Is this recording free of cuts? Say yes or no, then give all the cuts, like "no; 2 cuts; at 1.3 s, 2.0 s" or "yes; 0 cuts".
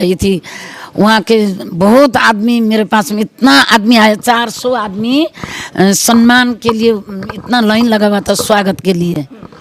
yes; 0 cuts